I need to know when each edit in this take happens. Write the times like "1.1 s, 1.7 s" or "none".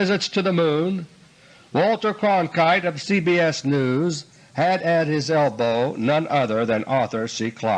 2.6 s

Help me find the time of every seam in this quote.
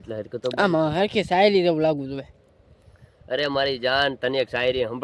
none

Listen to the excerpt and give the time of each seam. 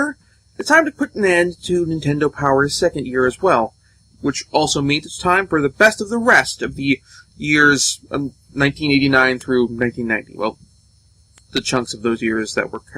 11.1 s

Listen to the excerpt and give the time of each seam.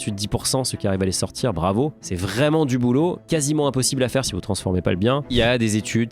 4.3 s, 5.3 s

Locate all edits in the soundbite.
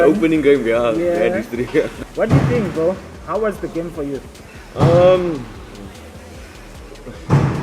2.0 s

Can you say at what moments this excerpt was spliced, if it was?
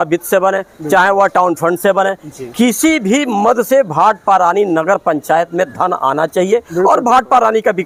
none

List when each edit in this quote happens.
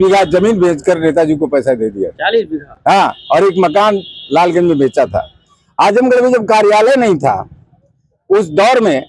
none

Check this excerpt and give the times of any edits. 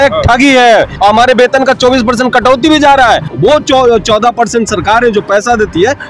0.9 s, 3.3 s

